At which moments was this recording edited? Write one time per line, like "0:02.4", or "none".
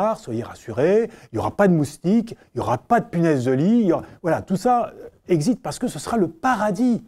none